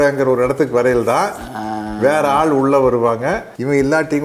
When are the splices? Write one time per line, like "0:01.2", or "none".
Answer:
none